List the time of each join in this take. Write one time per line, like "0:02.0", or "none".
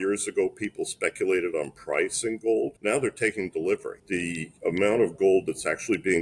0:02.8
0:03.9